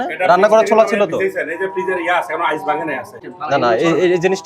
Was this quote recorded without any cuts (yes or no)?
no